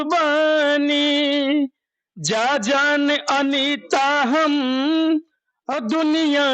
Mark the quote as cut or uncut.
uncut